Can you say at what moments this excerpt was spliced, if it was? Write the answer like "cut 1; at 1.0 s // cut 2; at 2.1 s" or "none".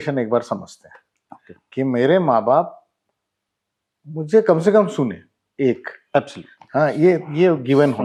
none

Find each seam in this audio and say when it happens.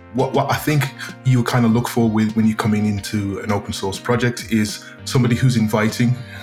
none

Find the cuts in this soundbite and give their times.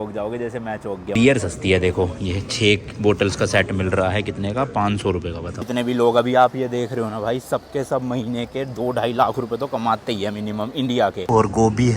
cut 1; at 1.1 s // cut 2; at 5.7 s // cut 3; at 11.2 s

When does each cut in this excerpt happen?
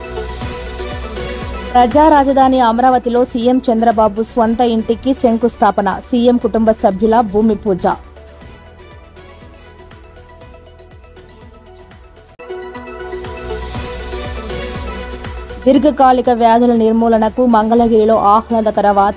cut 1; at 1.6 s

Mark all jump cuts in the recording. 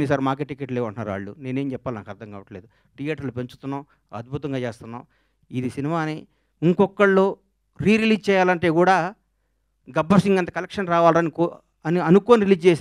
none

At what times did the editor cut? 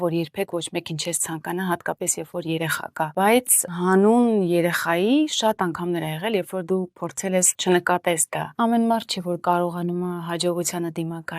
cut 1; at 3.1 s // cut 2; at 7.5 s // cut 3; at 8.5 s

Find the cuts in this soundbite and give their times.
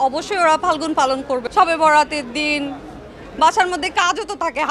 cut 1; at 1.4 s

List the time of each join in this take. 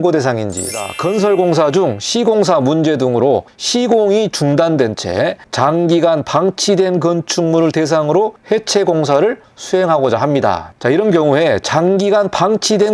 cut 1; at 0.9 s

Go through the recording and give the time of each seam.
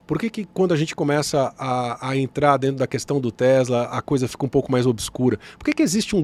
none

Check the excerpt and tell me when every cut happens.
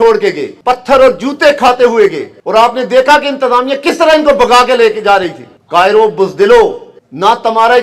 none

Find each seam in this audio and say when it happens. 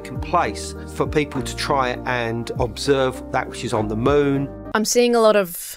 cut 1; at 4.5 s

